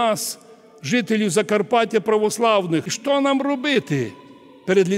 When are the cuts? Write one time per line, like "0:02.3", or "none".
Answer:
0:03.0

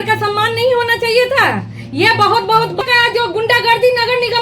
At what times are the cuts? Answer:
0:02.8

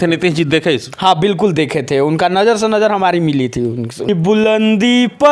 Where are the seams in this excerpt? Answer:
0:04.0

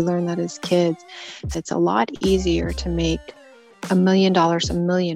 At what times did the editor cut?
0:01.5

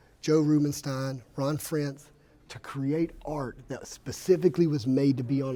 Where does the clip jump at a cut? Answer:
none

